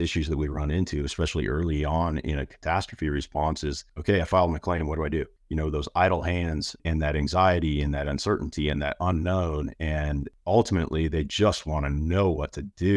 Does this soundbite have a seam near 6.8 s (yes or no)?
yes